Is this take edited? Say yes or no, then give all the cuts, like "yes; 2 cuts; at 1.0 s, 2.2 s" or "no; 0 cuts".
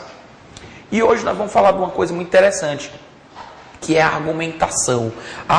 no; 0 cuts